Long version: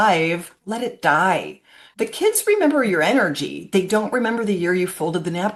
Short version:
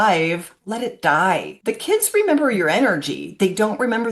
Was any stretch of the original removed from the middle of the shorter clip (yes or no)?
yes